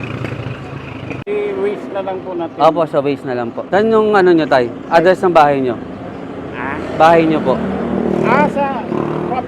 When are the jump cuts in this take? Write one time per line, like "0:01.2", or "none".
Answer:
0:03.5